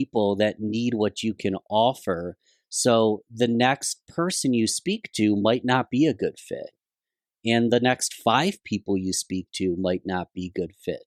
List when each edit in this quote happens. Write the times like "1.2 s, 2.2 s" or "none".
none